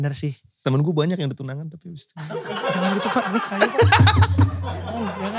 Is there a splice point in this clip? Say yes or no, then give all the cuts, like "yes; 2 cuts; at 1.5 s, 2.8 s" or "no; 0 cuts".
no; 0 cuts